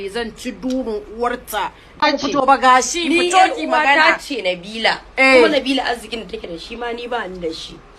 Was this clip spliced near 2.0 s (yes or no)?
yes